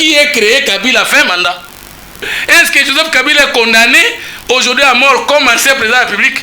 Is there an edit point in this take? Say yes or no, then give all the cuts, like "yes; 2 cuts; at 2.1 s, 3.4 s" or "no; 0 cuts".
yes; 1 cut; at 2.2 s